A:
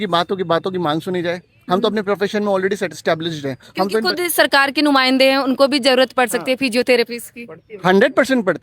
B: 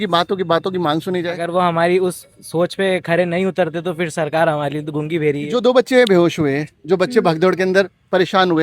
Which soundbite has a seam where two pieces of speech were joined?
B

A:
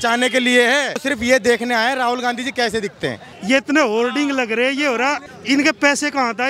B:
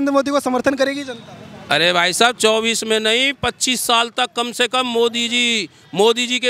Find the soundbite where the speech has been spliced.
A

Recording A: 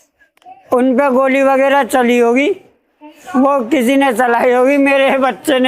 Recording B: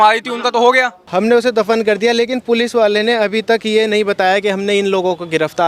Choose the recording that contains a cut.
B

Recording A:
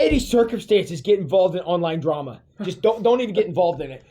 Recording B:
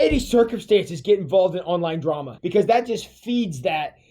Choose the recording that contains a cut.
B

